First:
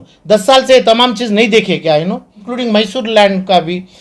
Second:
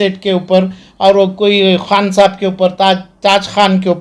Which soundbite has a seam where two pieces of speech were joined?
first; 1 cut; at 2.5 s

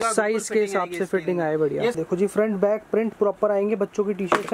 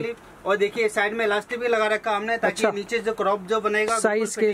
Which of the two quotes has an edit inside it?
first; 1 cut; at 2.0 s

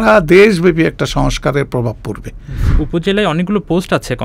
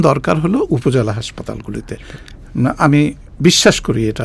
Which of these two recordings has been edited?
first; 1 cut; at 2.8 s

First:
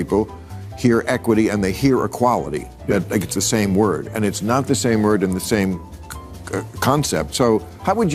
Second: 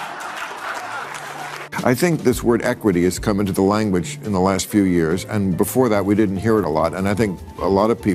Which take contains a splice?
second; 1 cut; at 1.7 s

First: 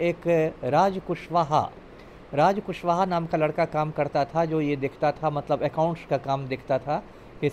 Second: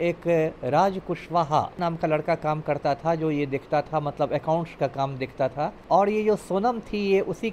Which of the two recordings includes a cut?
second; 2 cuts; at 1.8 s, 5.8 s

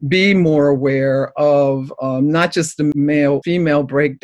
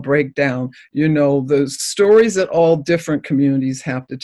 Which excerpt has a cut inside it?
first; 1 cut; at 2.9 s

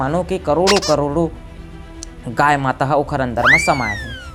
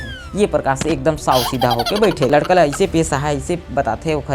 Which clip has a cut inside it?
second; 1 cut; at 2.3 s

